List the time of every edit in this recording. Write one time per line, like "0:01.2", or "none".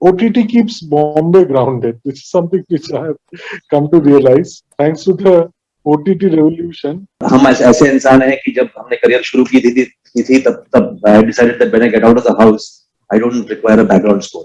0:07.2